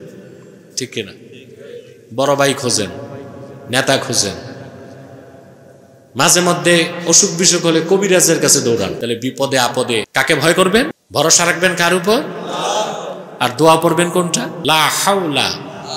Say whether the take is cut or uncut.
cut